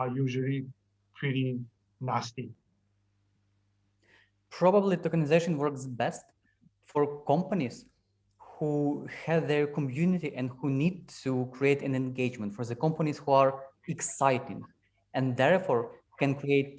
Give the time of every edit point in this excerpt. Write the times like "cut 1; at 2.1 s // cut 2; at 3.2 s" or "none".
none

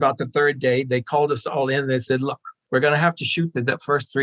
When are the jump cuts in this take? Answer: none

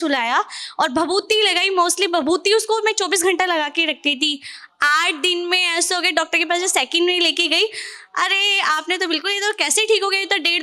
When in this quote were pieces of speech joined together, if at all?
none

